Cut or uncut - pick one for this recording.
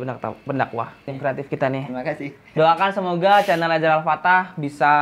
cut